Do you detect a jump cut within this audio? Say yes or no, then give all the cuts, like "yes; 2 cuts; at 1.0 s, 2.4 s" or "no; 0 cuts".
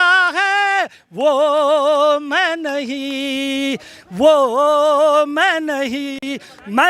no; 0 cuts